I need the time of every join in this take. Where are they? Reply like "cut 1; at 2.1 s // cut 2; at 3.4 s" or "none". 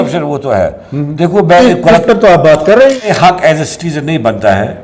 cut 1; at 3.1 s